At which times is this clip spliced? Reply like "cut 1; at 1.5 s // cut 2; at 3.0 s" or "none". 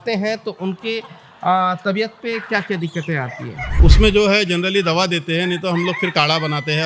cut 1; at 3.7 s